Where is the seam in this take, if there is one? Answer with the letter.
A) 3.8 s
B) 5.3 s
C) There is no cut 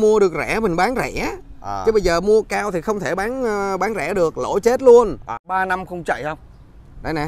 B